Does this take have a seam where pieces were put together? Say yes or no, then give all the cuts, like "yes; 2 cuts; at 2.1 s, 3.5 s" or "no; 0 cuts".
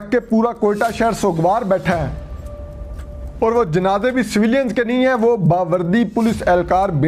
no; 0 cuts